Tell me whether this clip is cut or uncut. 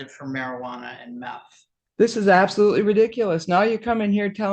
cut